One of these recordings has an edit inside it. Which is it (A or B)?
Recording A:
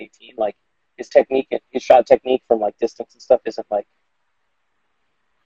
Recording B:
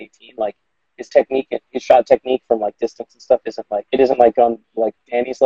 B